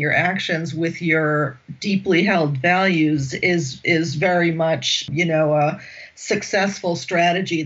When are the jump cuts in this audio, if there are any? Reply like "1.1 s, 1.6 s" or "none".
5.1 s